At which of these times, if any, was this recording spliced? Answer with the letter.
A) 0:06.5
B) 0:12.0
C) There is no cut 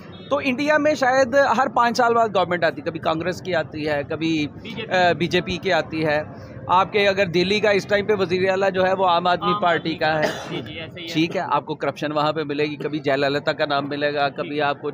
C